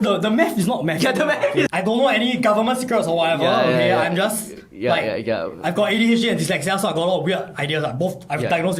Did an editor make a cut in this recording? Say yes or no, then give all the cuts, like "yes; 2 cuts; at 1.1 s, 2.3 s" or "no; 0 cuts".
yes; 1 cut; at 1.7 s